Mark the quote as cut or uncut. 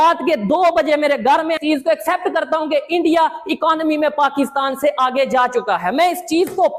uncut